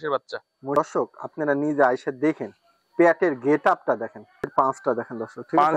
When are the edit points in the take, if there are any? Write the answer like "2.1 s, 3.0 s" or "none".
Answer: 0.7 s, 4.5 s